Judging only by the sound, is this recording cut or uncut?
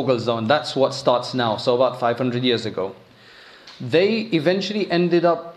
uncut